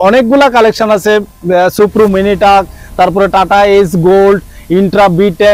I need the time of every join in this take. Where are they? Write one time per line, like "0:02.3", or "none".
none